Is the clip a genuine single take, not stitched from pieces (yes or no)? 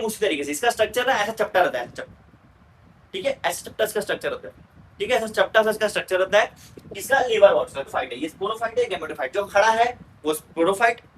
no